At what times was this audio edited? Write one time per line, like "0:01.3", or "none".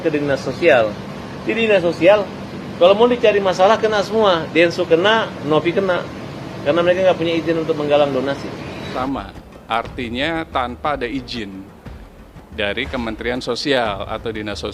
0:08.9

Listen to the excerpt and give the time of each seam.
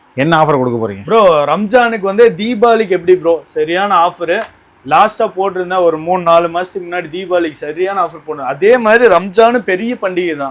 none

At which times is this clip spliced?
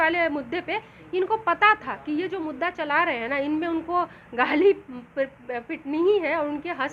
none

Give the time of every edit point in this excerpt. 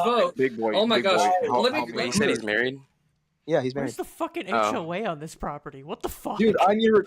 0:01.9

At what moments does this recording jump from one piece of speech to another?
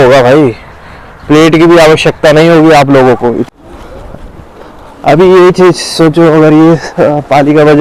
0:03.5

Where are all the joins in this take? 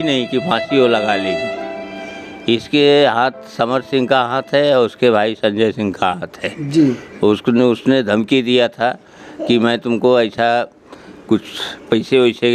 none

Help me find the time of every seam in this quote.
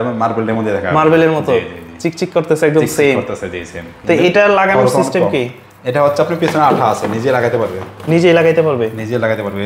none

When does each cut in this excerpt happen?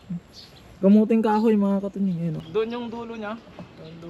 0:02.4

